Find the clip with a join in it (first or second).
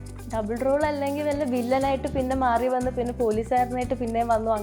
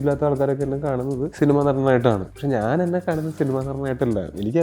second